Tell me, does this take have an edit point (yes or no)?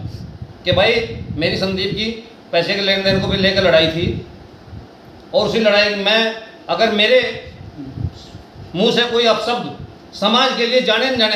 no